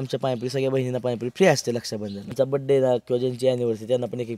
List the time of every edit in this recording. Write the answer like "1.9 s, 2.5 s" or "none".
2.3 s